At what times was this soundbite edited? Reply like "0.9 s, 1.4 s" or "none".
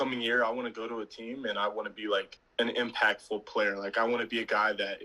2.4 s

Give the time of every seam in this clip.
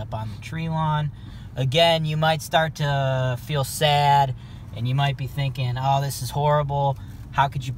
none

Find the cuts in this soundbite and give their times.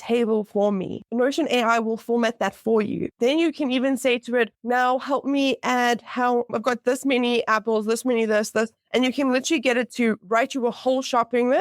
1.0 s, 3.1 s, 4.6 s

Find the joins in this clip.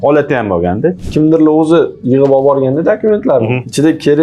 1.0 s

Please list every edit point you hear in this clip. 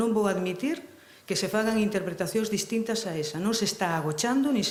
none

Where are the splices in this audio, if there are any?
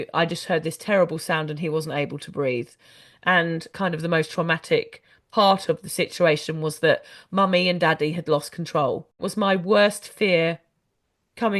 3.7 s, 9.2 s

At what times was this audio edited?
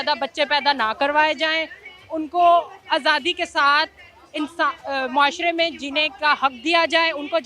none

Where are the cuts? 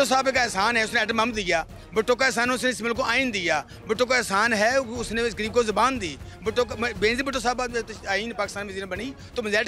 none

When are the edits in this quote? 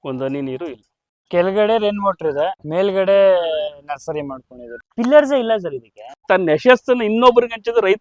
1.3 s, 2.6 s, 4.9 s, 6.2 s

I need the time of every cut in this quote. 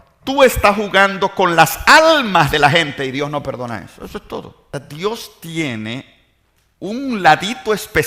4.6 s

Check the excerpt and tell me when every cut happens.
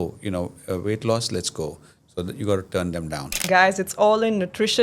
3.4 s

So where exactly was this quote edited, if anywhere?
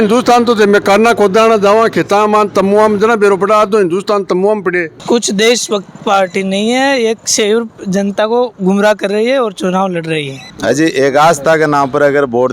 4.9 s, 10.5 s

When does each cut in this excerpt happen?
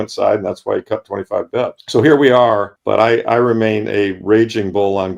1.8 s, 2.7 s

